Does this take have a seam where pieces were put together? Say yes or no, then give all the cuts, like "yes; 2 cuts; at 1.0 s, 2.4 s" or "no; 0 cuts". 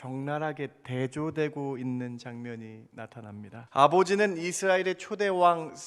yes; 1 cut; at 3.6 s